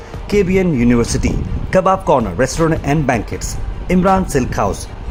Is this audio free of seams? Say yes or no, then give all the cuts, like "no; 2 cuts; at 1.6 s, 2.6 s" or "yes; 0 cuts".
yes; 0 cuts